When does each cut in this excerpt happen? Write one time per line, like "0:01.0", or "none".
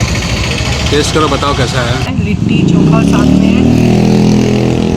0:02.1